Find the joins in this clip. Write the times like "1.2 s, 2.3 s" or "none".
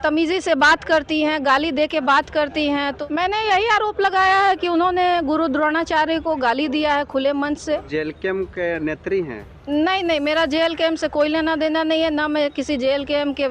3.0 s, 7.9 s